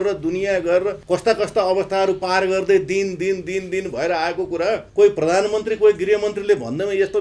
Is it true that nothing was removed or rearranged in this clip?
no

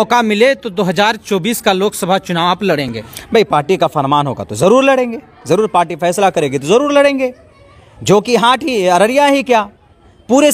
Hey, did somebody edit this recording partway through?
no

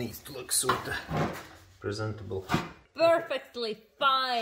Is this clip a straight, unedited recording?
no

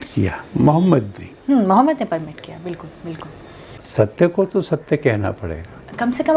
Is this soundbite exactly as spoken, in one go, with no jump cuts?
no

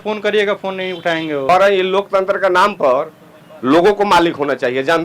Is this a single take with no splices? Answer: no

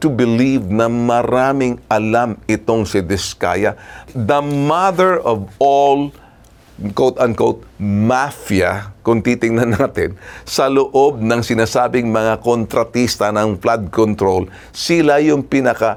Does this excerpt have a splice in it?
no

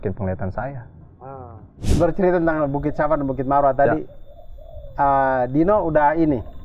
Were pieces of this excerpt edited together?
yes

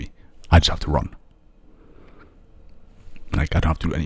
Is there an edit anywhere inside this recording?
no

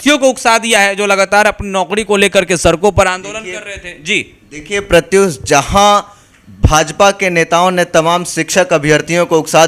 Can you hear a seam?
no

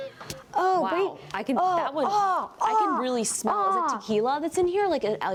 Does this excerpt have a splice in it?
no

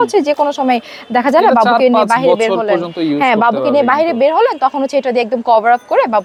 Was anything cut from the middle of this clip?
no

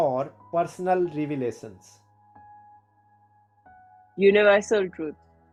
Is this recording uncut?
yes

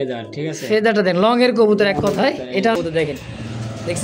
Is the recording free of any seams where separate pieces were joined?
no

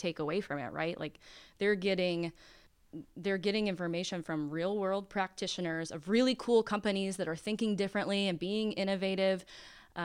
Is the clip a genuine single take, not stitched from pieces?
yes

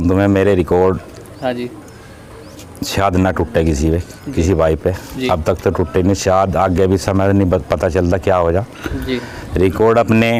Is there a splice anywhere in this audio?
no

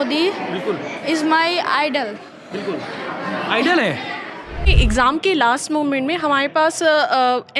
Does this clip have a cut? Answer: yes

